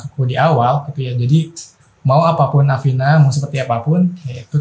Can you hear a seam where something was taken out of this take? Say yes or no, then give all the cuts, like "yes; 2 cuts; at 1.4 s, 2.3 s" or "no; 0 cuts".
no; 0 cuts